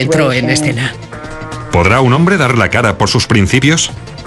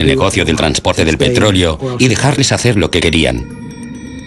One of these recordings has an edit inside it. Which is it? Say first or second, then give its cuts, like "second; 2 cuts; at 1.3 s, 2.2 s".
second; 1 cut; at 2.9 s